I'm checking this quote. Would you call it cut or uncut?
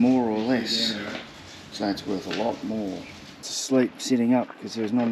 cut